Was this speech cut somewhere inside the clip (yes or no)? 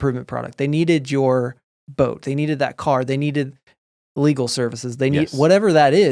no